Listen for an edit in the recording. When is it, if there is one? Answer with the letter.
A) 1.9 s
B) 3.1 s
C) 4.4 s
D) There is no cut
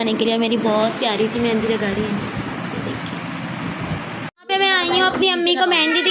C